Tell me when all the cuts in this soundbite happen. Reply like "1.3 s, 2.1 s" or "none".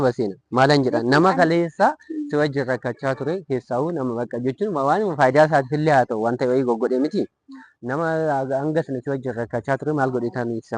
none